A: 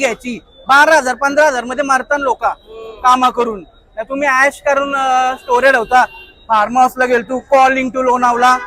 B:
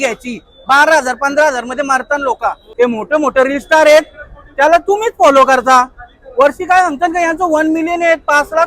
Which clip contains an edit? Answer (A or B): B